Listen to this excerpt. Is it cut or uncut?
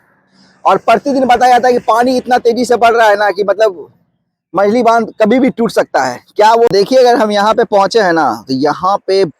cut